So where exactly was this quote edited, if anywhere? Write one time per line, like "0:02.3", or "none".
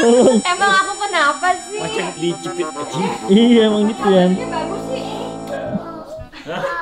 0:05.4